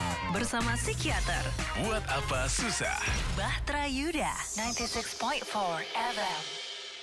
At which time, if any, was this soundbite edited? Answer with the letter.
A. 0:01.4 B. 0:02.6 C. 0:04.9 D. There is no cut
D